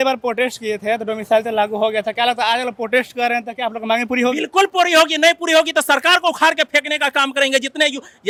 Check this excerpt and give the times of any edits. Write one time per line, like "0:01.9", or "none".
none